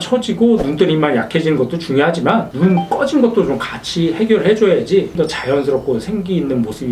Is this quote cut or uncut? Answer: cut